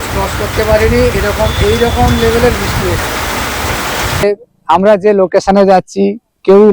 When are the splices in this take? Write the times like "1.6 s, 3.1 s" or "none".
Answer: 4.2 s